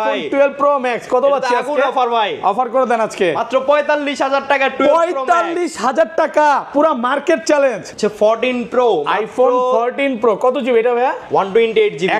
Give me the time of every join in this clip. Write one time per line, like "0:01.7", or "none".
0:07.9